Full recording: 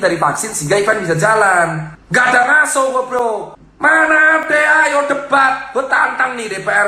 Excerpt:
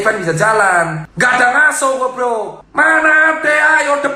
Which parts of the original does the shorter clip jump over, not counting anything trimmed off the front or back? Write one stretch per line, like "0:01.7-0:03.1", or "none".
0:01.9-0:02.0
0:03.5-0:03.7